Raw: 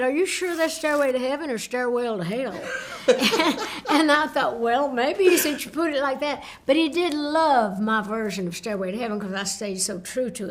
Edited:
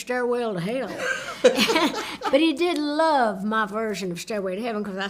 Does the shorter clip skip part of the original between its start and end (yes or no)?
yes